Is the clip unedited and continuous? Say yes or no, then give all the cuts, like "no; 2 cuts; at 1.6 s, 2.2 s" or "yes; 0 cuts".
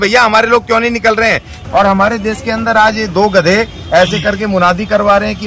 no; 1 cut; at 1.5 s